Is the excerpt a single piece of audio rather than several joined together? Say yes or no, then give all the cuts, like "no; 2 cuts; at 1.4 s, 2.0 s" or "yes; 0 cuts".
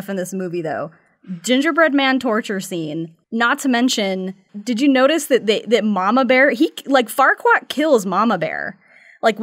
no; 2 cuts; at 3.1 s, 4.5 s